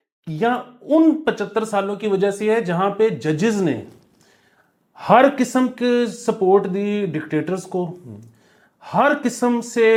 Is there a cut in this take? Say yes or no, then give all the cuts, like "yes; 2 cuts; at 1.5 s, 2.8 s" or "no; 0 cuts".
no; 0 cuts